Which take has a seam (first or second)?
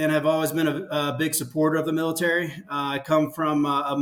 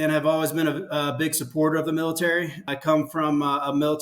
second